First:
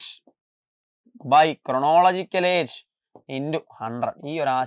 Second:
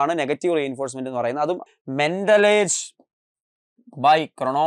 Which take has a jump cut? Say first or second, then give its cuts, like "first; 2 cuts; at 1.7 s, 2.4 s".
second; 1 cut; at 1.6 s